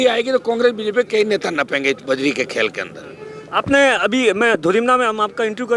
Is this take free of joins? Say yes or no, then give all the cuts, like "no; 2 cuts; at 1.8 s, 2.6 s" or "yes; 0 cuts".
yes; 0 cuts